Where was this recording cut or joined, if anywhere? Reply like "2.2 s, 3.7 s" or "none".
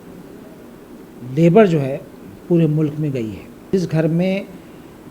3.7 s